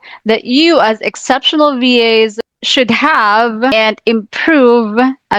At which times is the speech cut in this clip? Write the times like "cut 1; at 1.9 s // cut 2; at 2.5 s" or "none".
cut 1; at 3.7 s